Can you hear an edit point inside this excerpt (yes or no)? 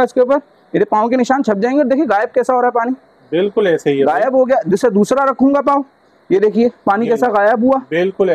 no